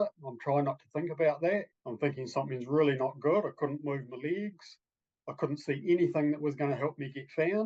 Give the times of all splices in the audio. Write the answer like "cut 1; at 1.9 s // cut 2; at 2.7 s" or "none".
cut 1; at 1.8 s